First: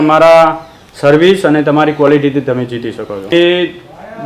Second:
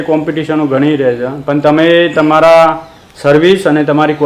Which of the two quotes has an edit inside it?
first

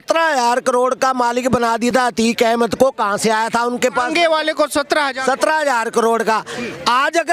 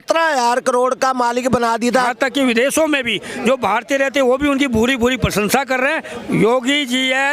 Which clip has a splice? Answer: second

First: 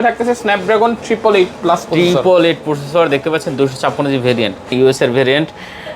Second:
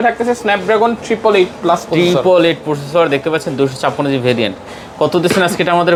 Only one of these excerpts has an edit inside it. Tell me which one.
first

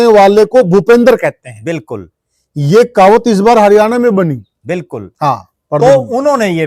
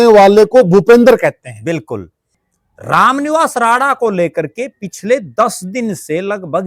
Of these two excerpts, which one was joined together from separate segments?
second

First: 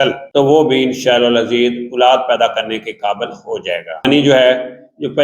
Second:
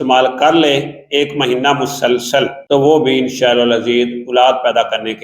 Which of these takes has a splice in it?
first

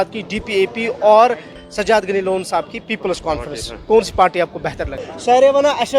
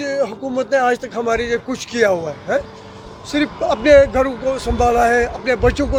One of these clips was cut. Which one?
first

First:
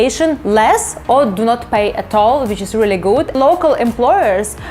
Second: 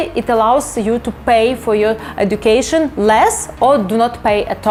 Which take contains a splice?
first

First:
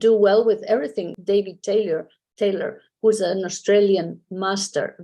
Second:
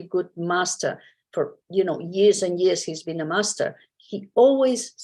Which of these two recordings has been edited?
first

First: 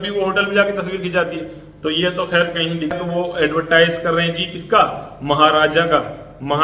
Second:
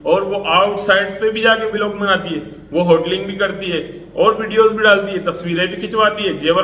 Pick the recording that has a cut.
first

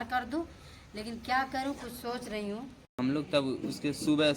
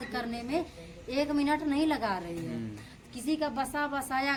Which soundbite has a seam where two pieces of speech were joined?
first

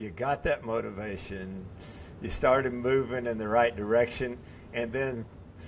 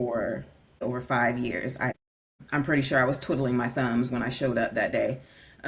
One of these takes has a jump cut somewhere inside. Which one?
second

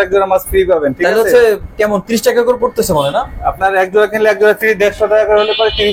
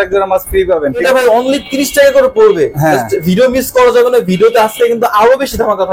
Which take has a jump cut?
second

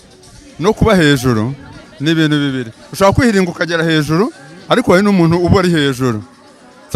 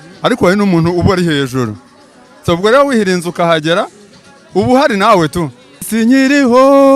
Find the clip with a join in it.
second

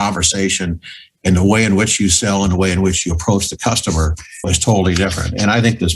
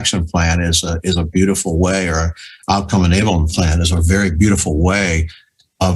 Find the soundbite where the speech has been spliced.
first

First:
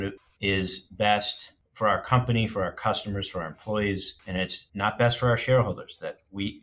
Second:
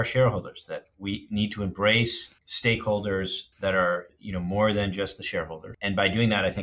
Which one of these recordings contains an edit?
second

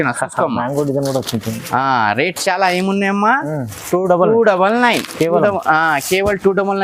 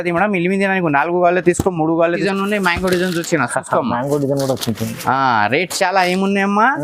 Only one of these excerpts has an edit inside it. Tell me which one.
second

